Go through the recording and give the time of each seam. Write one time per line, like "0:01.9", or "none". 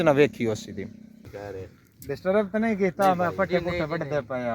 0:01.3